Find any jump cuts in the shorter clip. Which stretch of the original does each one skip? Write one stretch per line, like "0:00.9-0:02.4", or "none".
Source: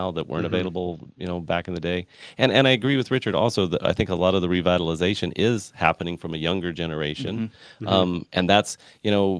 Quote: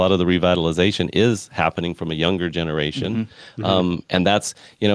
none